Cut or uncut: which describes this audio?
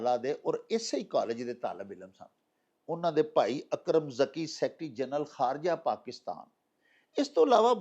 uncut